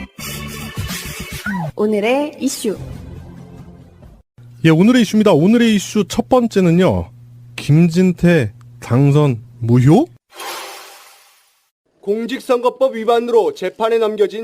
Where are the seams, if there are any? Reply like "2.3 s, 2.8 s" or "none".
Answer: 1.0 s